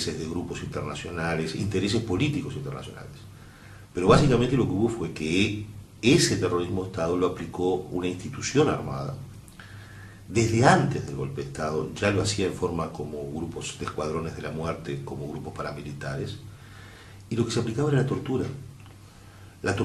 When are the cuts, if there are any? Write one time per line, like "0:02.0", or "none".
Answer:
0:05.2